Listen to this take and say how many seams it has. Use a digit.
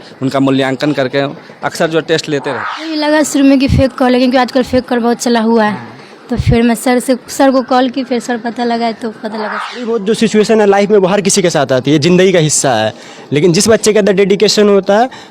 2